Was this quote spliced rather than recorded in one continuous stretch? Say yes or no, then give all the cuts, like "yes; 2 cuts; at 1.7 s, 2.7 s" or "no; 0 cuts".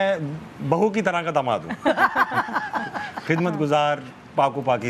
no; 0 cuts